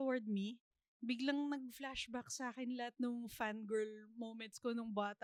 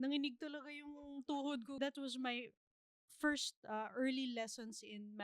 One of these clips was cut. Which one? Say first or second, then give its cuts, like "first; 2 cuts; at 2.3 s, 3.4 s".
second; 1 cut; at 1.8 s